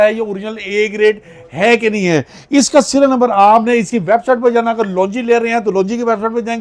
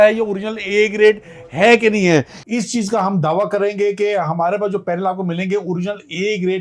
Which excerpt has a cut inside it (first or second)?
second